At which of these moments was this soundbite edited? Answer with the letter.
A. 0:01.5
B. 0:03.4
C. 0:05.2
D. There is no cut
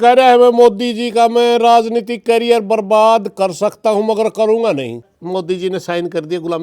C